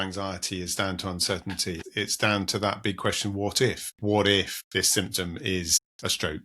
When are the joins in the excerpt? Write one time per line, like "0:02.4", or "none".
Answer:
0:01.8
0:03.9
0:04.6